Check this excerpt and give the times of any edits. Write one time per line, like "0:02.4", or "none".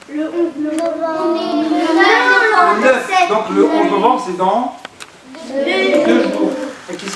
none